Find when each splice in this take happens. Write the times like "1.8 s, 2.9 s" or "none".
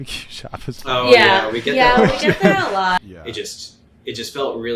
3.0 s